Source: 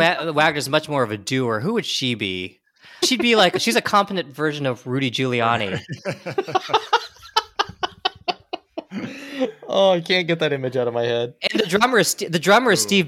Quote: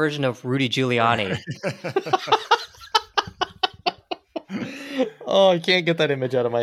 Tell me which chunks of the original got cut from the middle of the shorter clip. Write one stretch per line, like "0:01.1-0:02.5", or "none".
none